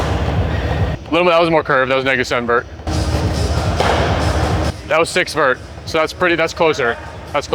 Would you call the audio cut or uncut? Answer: cut